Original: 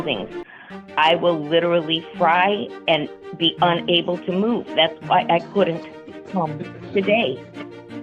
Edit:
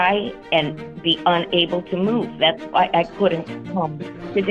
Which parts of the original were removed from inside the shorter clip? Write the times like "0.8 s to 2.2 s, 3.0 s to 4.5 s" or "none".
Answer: 5.9 s to 6.2 s